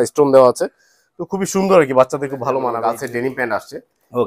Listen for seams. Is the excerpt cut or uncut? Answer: cut